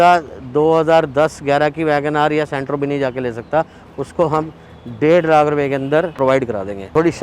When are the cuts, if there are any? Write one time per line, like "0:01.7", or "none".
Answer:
0:06.3